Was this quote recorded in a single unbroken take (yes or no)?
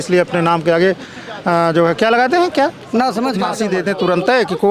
no